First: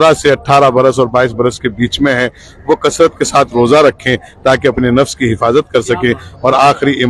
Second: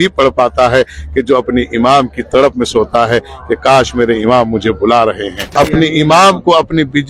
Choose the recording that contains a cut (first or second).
second